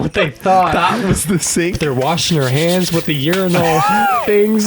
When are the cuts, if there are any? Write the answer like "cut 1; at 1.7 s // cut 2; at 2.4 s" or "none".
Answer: cut 1; at 1.8 s